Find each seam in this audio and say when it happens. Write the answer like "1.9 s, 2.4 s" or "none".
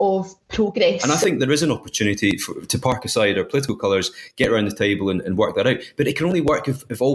1.0 s